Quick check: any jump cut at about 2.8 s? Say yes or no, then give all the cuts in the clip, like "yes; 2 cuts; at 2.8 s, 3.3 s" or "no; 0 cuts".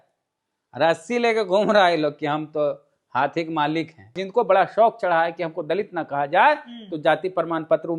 no; 1 cut; at 4.2 s